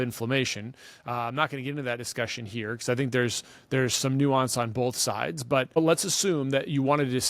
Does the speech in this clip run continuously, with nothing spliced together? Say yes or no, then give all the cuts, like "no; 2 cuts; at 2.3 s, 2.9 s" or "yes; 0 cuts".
no; 1 cut; at 5.8 s